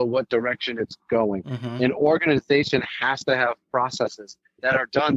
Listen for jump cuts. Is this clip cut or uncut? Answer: uncut